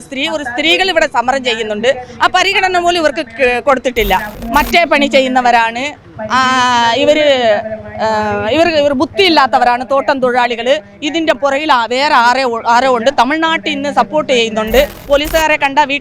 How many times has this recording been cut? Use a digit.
2